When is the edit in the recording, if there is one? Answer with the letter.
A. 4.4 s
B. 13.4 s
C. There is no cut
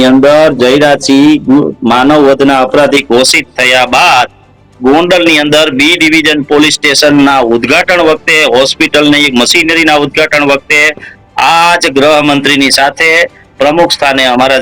C